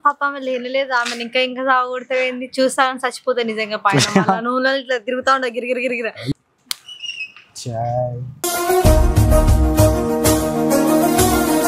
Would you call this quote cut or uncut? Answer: cut